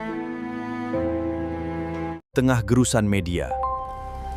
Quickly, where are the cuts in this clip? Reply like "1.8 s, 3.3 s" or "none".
2.2 s